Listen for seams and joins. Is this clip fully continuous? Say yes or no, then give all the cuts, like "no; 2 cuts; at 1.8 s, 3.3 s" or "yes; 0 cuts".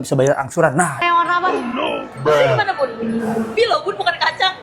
no; 2 cuts; at 1.0 s, 3.5 s